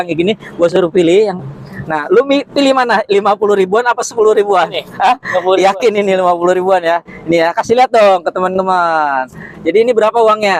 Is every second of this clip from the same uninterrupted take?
no; 1 cut; at 5.9 s

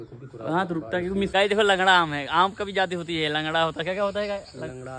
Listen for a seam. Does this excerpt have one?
yes; 1 cut; at 1.3 s

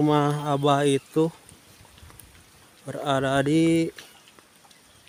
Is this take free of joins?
yes; 0 cuts

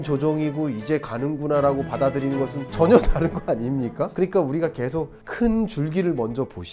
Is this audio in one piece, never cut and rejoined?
no; 2 cuts; at 4.1 s, 5.2 s

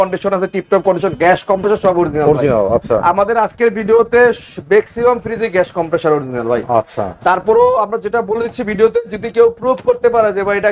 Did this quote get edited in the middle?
no; 0 cuts

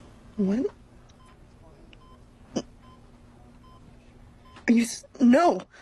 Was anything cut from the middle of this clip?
no; 0 cuts

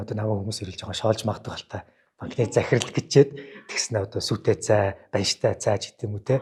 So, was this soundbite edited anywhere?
no; 0 cuts

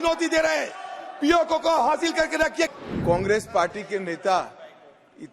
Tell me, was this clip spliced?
yes; 1 cut; at 2.7 s

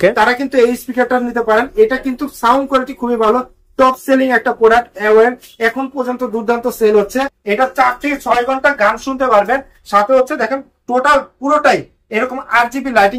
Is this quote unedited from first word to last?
no; 1 cut; at 7.4 s

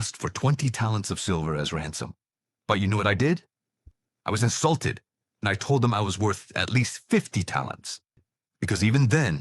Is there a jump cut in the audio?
yes; 1 cut; at 8.0 s

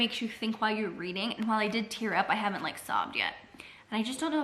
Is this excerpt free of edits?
yes; 0 cuts

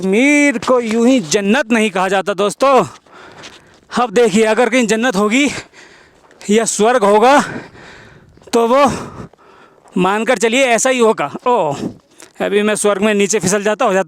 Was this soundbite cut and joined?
no; 0 cuts

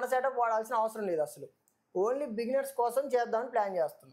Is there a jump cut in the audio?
no; 0 cuts

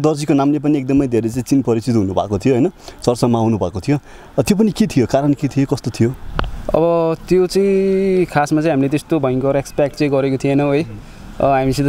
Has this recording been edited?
no; 0 cuts

